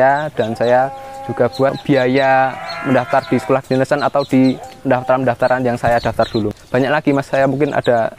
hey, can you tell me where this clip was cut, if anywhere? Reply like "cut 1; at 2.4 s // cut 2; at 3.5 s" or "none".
cut 1; at 1.8 s // cut 2; at 4.7 s // cut 3; at 6.6 s